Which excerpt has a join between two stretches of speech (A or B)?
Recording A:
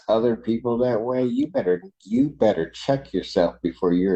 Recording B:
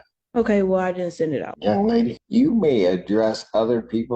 B